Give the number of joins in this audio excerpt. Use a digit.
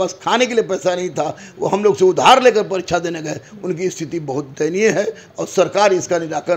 0